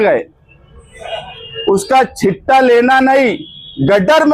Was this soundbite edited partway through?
no; 0 cuts

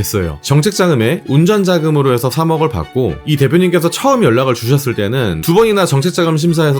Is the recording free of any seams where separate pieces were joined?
no; 1 cut; at 3.2 s

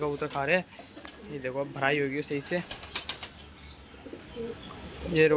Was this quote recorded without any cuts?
yes; 0 cuts

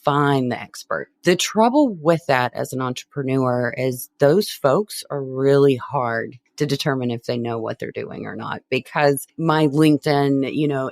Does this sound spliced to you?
yes; 2 cuts; at 6.4 s, 9.3 s

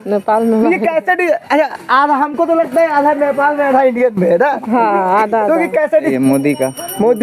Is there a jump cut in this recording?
yes; 1 cut; at 6.1 s

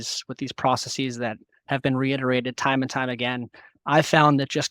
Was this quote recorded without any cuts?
yes; 0 cuts

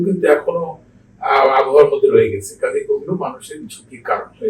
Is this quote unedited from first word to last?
yes; 0 cuts

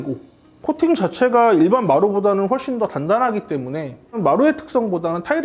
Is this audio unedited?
yes; 0 cuts

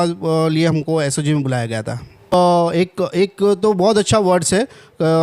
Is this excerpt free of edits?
no; 1 cut; at 2.3 s

